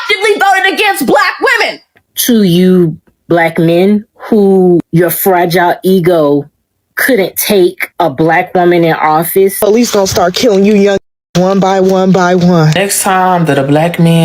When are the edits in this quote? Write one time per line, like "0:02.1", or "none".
0:02.0
0:09.6
0:12.8